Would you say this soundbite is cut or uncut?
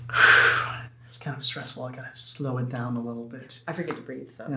uncut